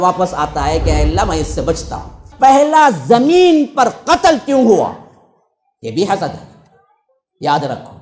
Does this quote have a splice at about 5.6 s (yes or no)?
no